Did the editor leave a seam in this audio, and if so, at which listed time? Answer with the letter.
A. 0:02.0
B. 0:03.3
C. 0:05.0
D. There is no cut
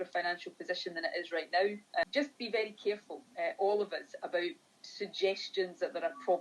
A